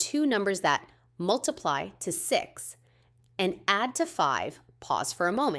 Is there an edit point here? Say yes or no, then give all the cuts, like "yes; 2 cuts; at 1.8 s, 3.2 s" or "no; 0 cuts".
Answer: yes; 1 cut; at 4.7 s